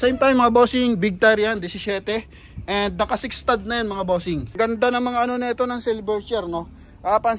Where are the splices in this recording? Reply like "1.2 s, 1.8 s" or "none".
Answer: 4.6 s